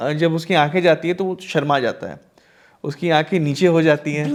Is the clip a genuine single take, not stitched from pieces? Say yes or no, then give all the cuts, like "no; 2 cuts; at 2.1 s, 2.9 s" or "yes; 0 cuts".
yes; 0 cuts